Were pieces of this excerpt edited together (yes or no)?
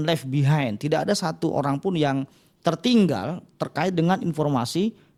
no